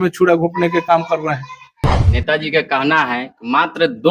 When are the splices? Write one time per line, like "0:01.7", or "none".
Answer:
0:01.7